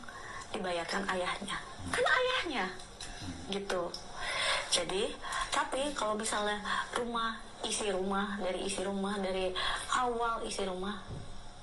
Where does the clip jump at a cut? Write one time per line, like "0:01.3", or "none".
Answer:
none